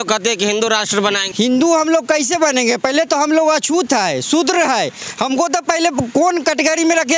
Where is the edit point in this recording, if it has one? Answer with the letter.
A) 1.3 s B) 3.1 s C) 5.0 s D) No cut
A